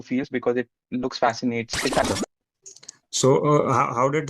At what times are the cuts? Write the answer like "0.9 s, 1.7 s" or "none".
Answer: 2.1 s